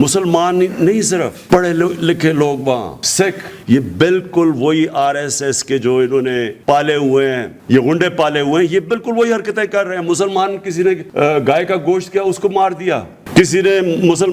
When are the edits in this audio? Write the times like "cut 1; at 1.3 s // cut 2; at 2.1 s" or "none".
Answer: cut 1; at 3.5 s // cut 2; at 6.5 s // cut 3; at 7.5 s // cut 4; at 11.1 s